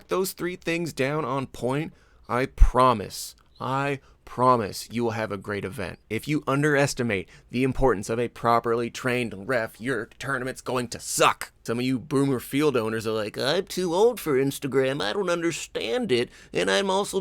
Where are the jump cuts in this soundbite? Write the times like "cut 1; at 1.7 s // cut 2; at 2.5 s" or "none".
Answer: cut 1; at 6.1 s // cut 2; at 11.5 s